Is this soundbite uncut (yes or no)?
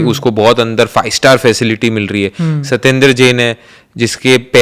yes